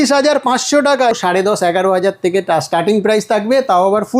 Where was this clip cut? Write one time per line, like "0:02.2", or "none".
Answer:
0:01.1